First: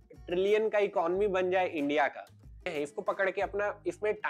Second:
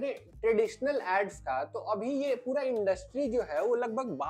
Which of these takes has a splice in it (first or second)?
first